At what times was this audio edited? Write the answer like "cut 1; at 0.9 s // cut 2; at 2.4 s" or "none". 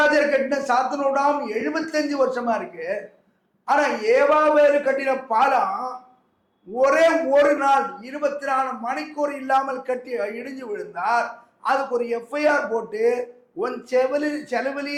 none